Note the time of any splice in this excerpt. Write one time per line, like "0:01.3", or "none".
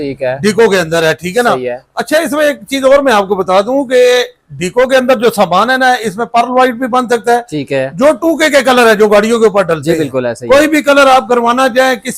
none